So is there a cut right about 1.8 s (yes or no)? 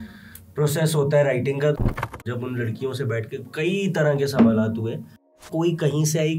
yes